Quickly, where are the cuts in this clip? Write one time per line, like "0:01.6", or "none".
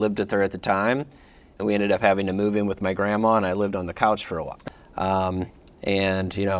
0:04.5